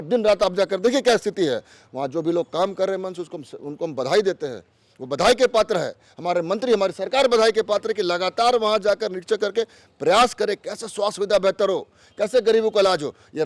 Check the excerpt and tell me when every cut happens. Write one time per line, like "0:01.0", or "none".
none